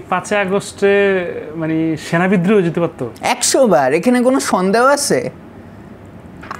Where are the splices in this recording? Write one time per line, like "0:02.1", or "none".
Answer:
none